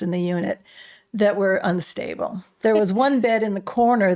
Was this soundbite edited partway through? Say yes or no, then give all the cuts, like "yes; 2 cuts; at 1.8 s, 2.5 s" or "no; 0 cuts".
yes; 1 cut; at 2.5 s